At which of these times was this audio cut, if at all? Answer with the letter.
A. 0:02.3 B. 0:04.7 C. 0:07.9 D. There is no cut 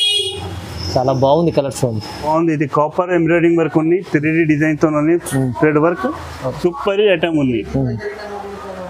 A